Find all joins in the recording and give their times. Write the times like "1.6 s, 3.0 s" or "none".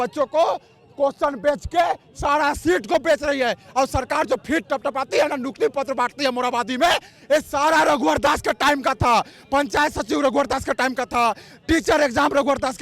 none